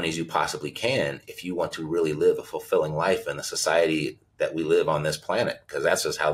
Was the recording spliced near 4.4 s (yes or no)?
no